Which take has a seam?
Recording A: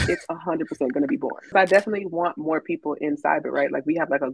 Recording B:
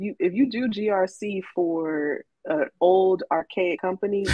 A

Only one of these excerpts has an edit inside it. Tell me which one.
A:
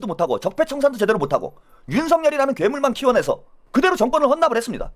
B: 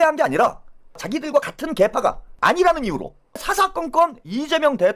B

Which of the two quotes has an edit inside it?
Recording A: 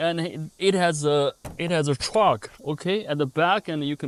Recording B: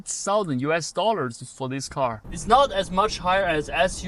B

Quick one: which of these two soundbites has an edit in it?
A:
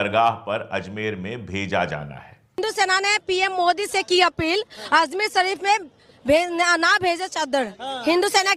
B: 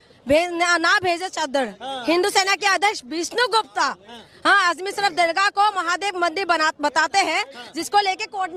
A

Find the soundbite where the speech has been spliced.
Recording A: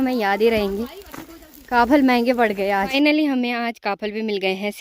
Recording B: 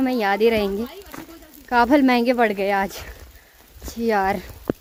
A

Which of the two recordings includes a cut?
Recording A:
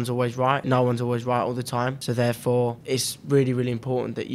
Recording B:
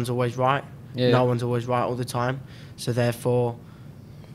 A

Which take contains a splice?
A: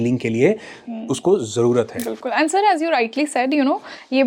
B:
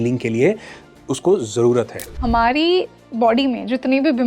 B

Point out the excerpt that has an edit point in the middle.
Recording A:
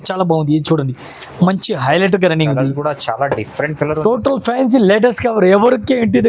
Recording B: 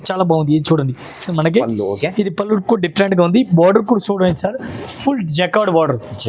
B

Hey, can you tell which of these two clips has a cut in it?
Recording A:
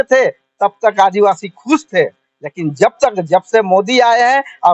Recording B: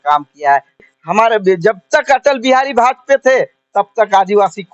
B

